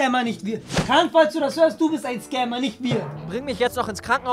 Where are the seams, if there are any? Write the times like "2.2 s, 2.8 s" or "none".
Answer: 3.2 s